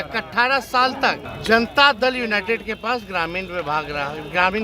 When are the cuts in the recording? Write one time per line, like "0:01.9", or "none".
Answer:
0:01.3